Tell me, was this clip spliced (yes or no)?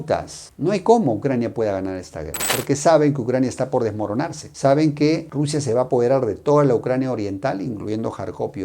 yes